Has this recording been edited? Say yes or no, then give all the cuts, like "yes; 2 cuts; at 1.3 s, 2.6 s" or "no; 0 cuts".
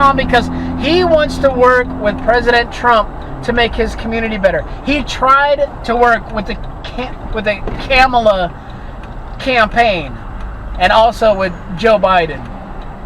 no; 0 cuts